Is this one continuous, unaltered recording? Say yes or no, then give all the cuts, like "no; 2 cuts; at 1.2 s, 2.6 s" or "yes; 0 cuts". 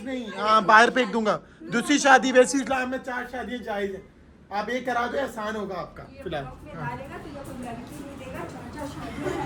yes; 0 cuts